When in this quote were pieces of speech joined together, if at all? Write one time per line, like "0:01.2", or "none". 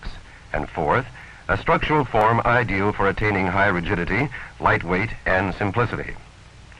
none